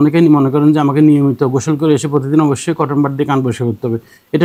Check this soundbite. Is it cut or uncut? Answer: uncut